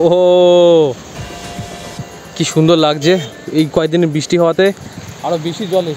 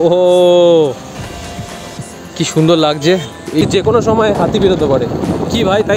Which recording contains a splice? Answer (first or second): second